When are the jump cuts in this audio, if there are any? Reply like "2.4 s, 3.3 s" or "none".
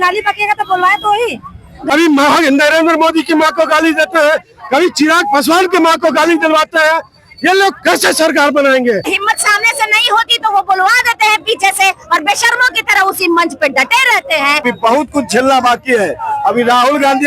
1.8 s, 9.2 s, 14.6 s